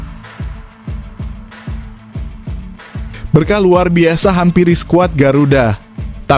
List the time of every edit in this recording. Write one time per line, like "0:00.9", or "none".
none